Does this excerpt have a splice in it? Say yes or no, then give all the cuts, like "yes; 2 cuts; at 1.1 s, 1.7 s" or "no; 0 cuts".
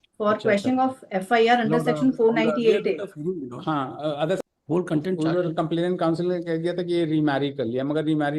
yes; 1 cut; at 4.4 s